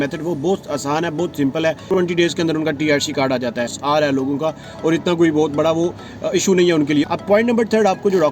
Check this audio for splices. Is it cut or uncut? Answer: cut